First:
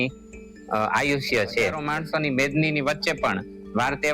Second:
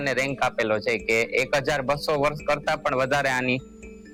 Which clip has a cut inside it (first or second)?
first